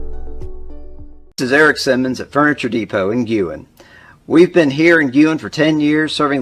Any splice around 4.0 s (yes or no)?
no